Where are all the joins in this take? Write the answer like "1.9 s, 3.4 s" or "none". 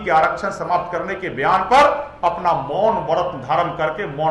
none